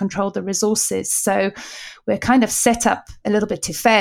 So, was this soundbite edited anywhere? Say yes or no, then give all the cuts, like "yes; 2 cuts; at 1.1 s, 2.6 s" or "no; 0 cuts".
yes; 1 cut; at 3.1 s